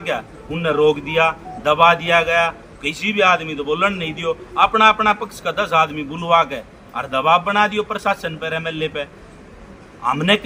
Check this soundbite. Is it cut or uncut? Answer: uncut